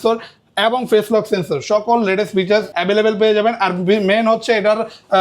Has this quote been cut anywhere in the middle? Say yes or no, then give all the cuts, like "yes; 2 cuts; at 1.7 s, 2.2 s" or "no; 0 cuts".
yes; 1 cut; at 2.7 s